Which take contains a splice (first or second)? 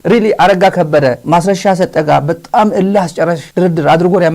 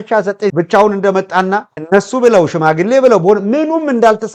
first